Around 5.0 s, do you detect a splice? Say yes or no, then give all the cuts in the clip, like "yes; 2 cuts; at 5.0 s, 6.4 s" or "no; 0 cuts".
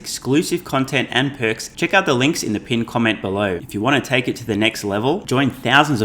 no; 2 cuts; at 1.7 s, 3.6 s